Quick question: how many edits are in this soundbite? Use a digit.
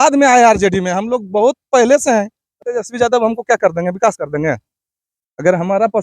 1